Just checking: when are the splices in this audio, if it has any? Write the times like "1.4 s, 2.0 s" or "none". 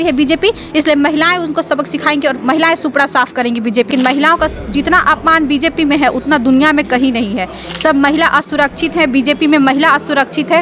3.9 s

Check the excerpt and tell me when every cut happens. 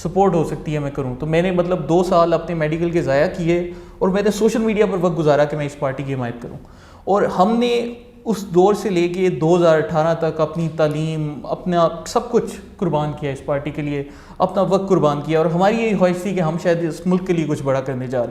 none

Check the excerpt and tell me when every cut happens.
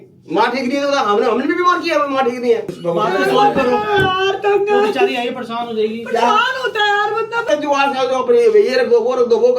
2.8 s, 5.9 s, 7.4 s

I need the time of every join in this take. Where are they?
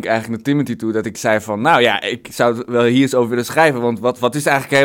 none

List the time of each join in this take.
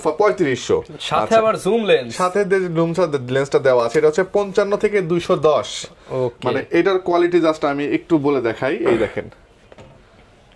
none

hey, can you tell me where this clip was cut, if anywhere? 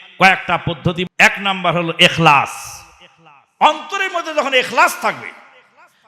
1.0 s

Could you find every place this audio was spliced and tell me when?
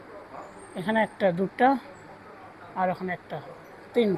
none

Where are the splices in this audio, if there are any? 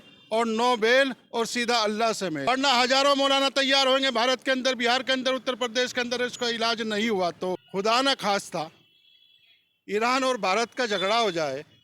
2.5 s, 7.6 s

